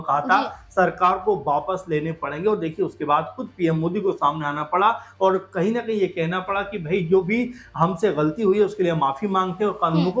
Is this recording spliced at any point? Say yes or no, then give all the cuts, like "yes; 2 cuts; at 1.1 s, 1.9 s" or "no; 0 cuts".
no; 0 cuts